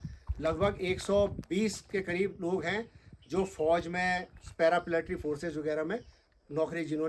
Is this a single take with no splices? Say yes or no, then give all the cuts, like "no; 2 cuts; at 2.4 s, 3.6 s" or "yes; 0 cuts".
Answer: yes; 0 cuts